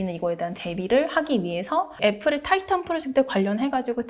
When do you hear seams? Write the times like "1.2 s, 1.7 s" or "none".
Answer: 2.0 s